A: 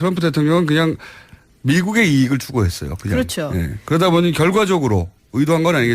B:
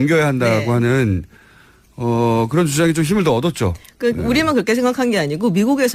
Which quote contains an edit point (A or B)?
A